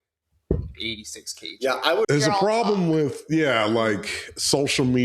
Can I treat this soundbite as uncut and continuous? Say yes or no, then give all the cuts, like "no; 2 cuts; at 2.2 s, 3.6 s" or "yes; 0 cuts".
no; 1 cut; at 2.1 s